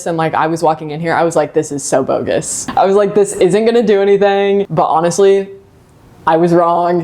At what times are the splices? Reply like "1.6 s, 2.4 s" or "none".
2.6 s, 4.7 s